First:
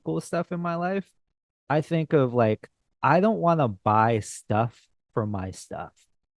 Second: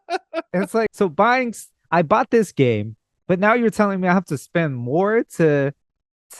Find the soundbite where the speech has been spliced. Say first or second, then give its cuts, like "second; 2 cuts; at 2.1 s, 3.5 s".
second; 1 cut; at 0.9 s